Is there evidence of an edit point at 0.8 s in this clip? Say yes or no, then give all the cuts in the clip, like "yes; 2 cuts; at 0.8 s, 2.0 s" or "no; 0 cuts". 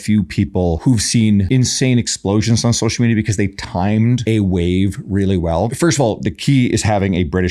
yes; 4 cuts; at 0.8 s, 1.5 s, 4.2 s, 5.7 s